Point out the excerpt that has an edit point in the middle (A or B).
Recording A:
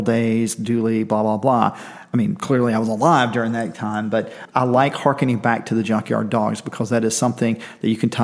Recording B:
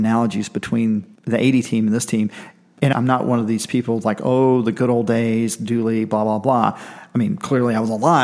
B